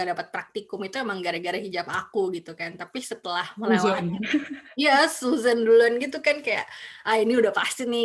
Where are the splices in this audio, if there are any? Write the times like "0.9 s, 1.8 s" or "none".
none